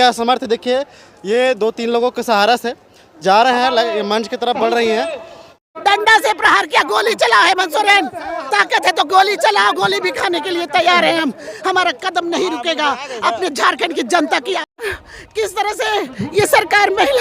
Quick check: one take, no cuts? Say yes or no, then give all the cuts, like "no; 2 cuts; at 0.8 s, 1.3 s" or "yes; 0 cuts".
no; 2 cuts; at 5.5 s, 14.7 s